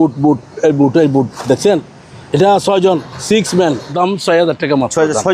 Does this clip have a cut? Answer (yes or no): yes